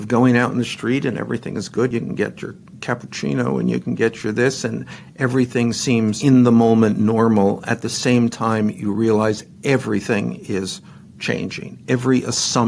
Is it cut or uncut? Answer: cut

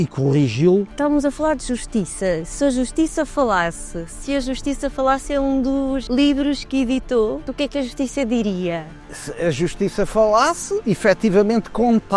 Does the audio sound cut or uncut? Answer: cut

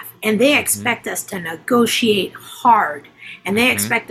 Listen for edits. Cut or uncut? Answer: uncut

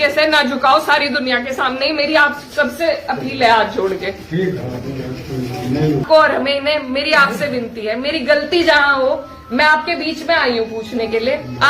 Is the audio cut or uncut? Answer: cut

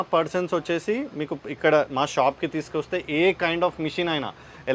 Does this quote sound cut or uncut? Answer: uncut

